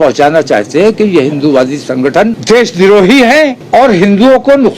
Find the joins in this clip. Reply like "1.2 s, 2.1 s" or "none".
2.4 s, 3.6 s